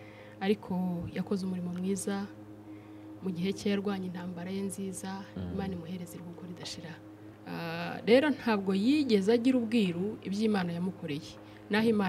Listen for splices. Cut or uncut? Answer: cut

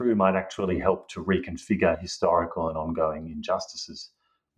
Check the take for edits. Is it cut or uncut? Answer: uncut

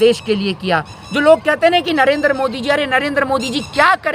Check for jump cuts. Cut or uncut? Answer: uncut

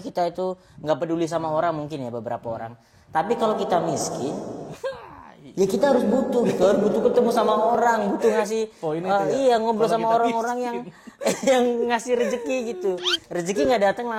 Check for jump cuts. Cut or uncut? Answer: uncut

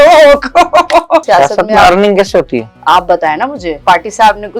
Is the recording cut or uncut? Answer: cut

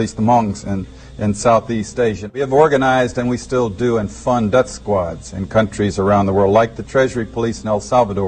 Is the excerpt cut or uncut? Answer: uncut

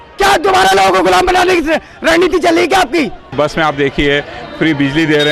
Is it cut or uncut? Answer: uncut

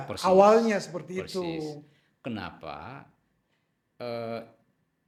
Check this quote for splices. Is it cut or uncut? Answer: uncut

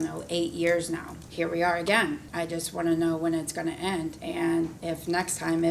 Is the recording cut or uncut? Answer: cut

